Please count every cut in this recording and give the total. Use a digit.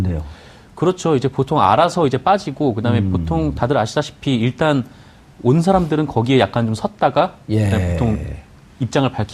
1